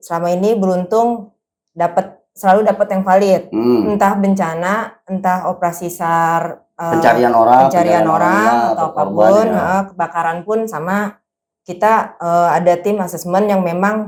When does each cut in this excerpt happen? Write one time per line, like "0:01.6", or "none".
none